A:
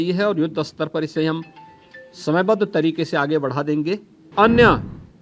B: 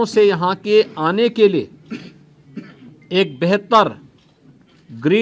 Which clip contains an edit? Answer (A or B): A